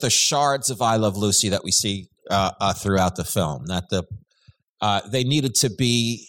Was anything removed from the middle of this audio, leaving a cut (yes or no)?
no